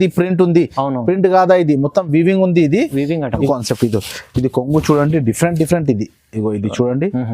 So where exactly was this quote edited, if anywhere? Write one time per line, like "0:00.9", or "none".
0:03.4